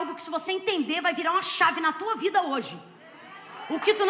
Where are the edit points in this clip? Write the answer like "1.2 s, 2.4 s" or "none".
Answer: none